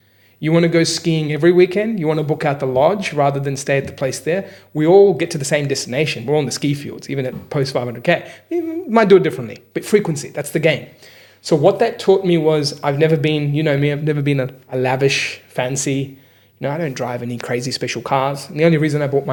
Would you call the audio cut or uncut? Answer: uncut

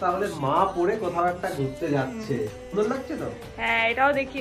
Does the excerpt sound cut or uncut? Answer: cut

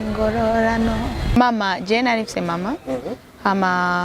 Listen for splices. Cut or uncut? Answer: cut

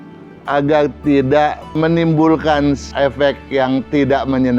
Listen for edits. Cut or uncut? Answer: cut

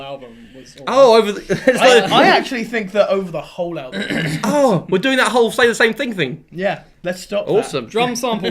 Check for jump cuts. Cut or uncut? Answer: cut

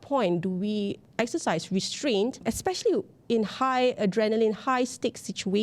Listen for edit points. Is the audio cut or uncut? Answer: cut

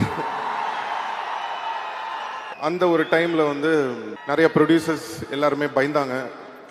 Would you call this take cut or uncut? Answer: cut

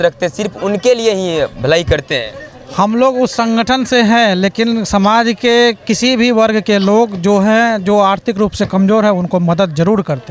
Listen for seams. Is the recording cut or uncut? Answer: uncut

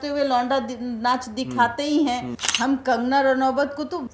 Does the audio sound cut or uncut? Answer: cut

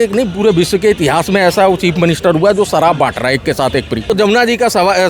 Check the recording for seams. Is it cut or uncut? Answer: cut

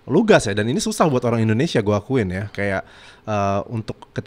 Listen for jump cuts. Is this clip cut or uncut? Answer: uncut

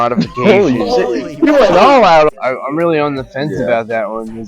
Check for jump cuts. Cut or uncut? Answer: cut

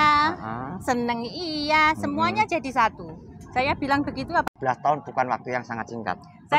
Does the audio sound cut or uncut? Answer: cut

